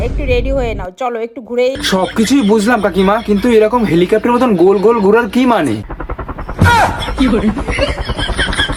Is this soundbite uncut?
yes; 0 cuts

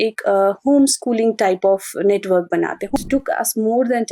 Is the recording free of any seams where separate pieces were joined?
no; 1 cut; at 3.0 s

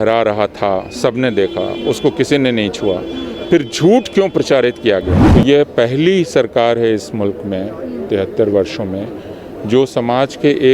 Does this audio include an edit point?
yes; 1 cut; at 5.2 s

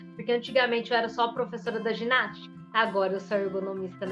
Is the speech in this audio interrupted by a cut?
no; 0 cuts

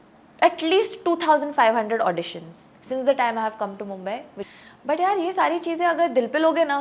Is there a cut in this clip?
yes; 1 cut; at 4.4 s

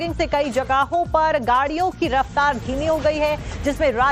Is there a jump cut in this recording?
no; 0 cuts

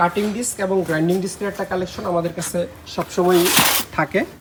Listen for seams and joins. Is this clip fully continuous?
yes; 0 cuts

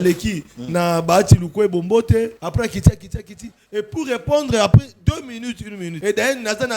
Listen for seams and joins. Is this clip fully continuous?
no; 2 cuts; at 2.4 s, 5.9 s

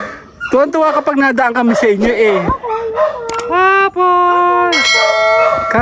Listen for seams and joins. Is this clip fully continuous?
yes; 0 cuts

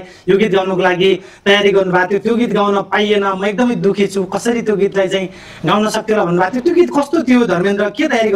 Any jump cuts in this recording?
no; 0 cuts

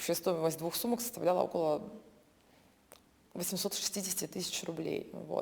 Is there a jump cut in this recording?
no; 0 cuts

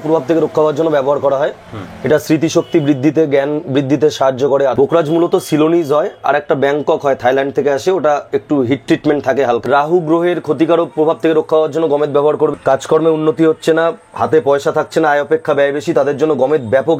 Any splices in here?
yes; 3 cuts; at 4.7 s, 9.6 s, 12.5 s

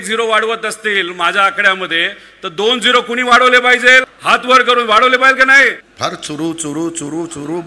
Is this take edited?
yes; 2 cuts; at 4.1 s, 5.9 s

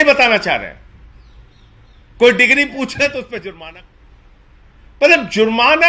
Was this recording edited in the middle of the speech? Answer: yes; 1 cut; at 3.5 s

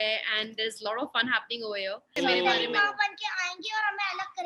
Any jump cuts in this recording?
yes; 1 cut; at 2.1 s

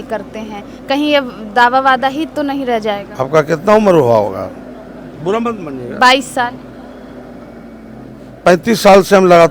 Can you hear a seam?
no; 0 cuts

